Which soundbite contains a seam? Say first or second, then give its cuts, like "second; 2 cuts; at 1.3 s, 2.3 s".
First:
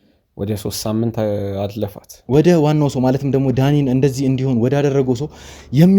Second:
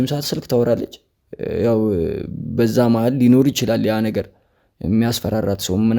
first; 1 cut; at 2.1 s